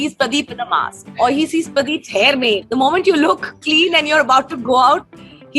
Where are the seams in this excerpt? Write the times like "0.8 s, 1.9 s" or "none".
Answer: 2.6 s